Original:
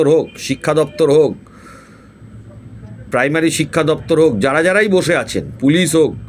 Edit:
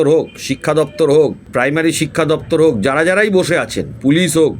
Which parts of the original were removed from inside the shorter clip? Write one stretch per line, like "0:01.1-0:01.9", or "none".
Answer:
0:01.4-0:03.0